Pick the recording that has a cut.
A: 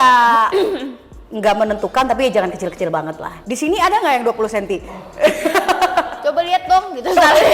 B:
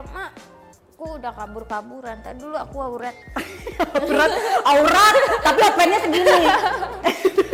A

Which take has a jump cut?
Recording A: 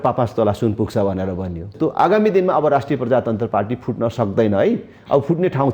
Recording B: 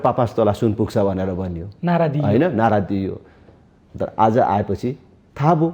A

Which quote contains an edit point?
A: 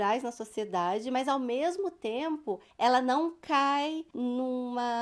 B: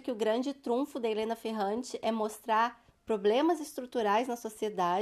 A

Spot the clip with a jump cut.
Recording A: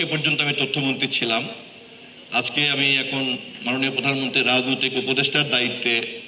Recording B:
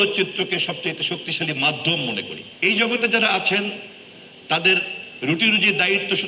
B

